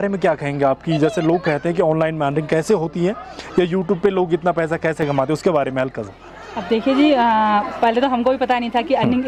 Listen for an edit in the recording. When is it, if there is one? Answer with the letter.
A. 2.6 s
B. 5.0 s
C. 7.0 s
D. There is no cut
D